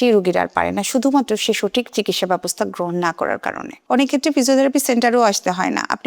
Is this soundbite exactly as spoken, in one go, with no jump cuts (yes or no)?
no